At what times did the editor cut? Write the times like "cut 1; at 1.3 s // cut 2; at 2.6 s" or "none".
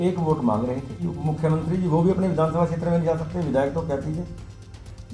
cut 1; at 1.1 s